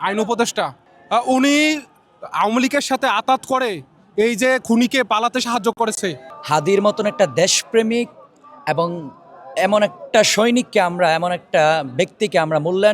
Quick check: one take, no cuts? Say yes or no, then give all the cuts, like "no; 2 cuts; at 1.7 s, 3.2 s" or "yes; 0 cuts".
no; 1 cut; at 6.3 s